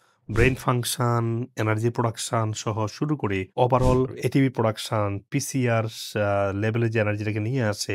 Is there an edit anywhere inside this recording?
no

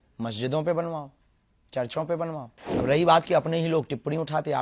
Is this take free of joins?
no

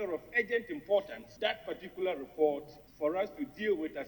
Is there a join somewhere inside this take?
yes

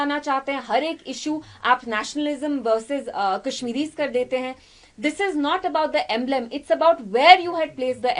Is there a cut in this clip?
no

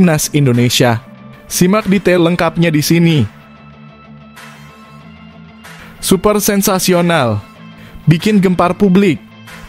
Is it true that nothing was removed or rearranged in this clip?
no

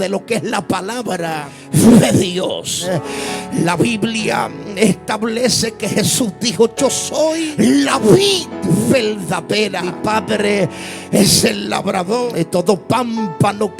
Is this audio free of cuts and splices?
no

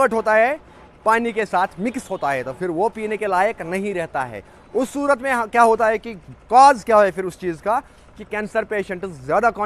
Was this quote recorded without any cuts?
yes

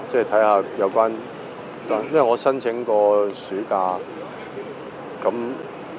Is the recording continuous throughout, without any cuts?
no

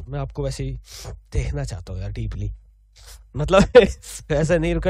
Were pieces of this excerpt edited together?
yes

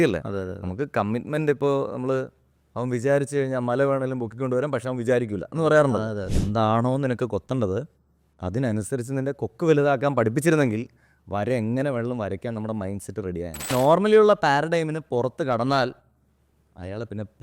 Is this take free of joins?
no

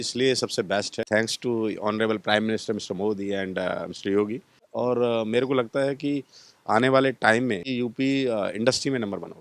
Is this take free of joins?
no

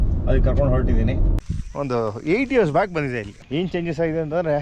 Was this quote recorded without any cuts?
no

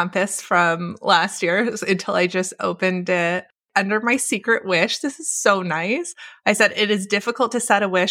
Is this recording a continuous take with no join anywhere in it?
no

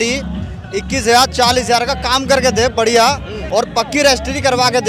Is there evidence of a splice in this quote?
yes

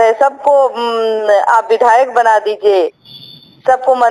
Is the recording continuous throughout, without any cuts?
yes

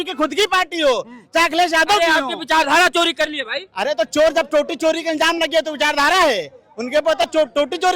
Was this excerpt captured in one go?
yes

